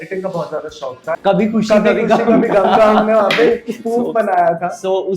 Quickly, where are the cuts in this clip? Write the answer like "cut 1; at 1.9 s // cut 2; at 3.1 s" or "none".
cut 1; at 1.2 s